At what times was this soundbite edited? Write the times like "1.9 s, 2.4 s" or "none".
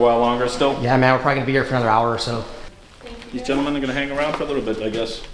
2.6 s